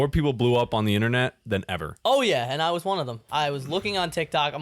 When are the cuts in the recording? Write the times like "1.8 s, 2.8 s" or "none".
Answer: 3.2 s